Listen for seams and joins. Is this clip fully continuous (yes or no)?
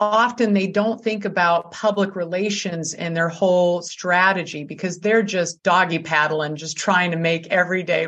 no